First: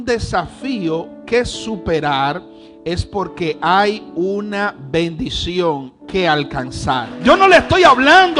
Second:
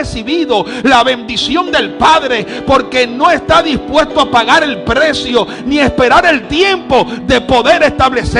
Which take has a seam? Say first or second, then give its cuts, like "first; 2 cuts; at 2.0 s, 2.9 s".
first; 1 cut; at 7.1 s